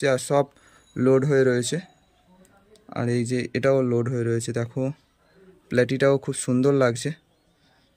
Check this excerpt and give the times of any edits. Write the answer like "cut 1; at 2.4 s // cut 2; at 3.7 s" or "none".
none